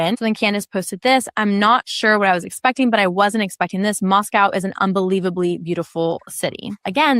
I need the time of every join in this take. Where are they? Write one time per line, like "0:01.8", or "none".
none